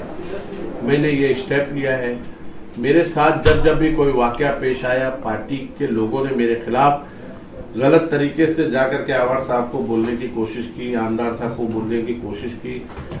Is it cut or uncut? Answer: uncut